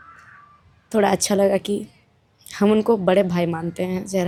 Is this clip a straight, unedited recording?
yes; 0 cuts

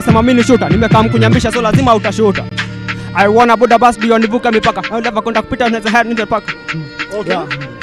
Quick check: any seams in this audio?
no; 0 cuts

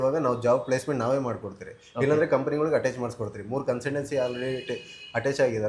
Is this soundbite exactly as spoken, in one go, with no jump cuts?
yes; 0 cuts

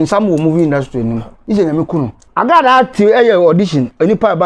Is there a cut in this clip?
yes; 2 cuts; at 1.4 s, 2.2 s

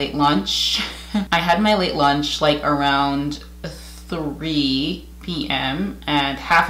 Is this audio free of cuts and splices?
no; 1 cut; at 1.3 s

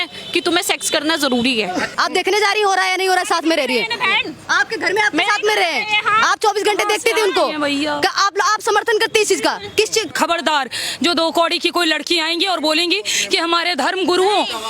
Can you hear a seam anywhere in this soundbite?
yes; 2 cuts; at 1.9 s, 10.1 s

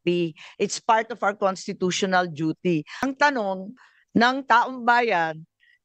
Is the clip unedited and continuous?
no; 1 cut; at 2.9 s

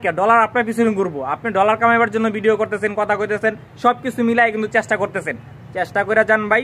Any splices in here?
no; 0 cuts

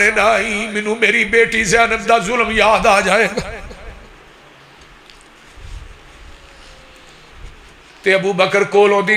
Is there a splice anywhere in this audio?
yes; 1 cut; at 7.8 s

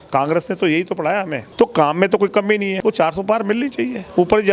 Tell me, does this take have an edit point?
yes; 2 cuts; at 1.4 s, 2.8 s

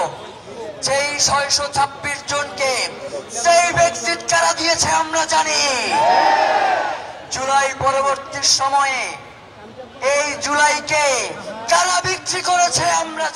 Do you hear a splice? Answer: no; 0 cuts

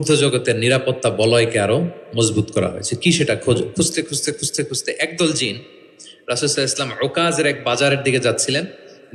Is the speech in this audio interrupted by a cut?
no; 0 cuts

